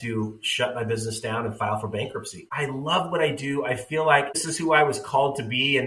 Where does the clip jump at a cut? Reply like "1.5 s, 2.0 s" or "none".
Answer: 2.5 s, 4.4 s